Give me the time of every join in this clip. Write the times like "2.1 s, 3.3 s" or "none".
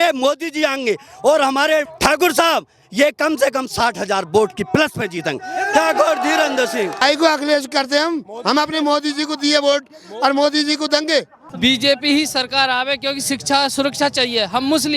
1.9 s, 7.0 s, 11.4 s